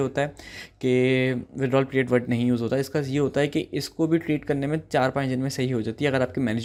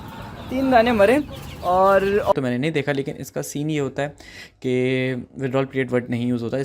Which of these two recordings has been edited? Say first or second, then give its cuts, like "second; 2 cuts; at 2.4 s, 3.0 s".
second; 1 cut; at 2.3 s